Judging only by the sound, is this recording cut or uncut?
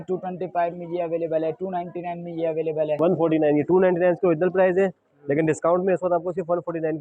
cut